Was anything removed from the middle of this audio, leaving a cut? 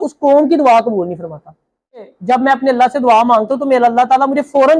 yes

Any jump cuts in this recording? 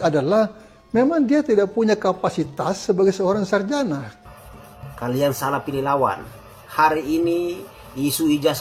yes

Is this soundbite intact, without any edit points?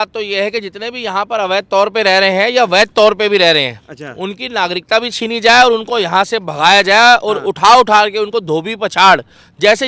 yes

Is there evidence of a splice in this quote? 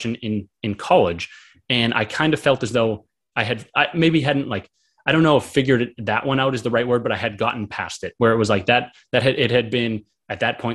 no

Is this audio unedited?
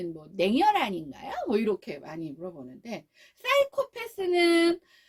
yes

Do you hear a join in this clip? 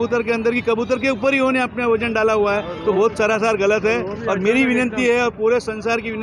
no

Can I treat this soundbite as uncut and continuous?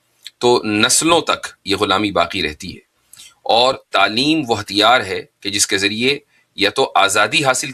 yes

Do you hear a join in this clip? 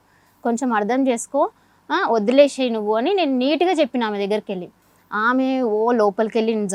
no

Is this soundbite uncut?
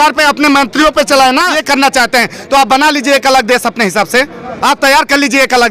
no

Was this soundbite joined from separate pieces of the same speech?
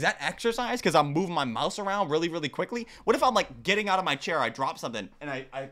no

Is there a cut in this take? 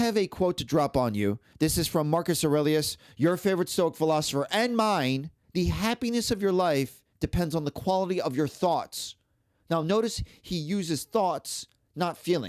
yes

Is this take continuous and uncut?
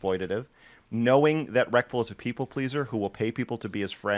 yes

